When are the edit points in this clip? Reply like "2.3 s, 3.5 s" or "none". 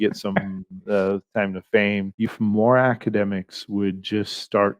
2.3 s